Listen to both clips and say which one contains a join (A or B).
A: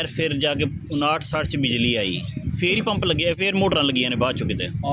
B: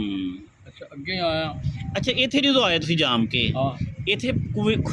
B